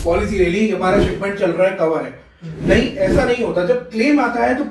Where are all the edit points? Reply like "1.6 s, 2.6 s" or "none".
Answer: none